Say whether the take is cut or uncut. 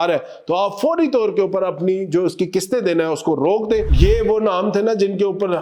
cut